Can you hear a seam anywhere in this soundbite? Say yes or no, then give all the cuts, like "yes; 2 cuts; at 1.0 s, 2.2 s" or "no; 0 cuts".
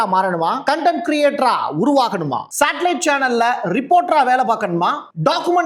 no; 0 cuts